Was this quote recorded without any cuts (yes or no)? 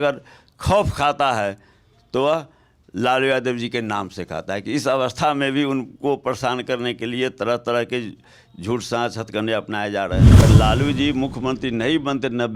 no